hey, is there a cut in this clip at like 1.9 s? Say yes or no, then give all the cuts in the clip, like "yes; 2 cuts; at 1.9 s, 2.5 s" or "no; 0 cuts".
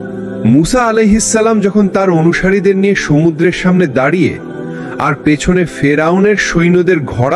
no; 0 cuts